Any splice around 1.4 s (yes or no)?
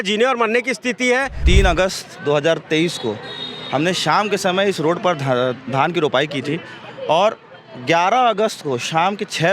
yes